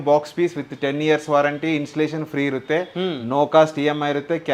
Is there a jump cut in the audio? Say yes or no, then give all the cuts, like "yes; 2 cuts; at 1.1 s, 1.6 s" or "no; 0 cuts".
no; 0 cuts